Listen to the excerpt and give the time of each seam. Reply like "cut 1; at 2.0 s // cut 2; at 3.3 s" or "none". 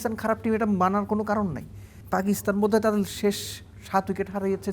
cut 1; at 1.9 s